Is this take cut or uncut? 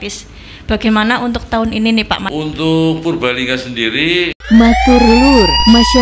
cut